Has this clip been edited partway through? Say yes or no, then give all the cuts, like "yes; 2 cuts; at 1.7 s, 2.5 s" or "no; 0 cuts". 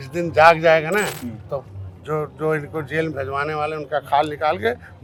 no; 0 cuts